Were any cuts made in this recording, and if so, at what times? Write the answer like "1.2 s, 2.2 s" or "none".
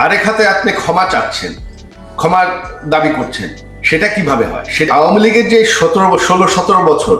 4.9 s